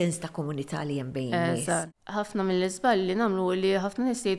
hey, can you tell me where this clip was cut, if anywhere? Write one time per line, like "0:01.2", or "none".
0:01.9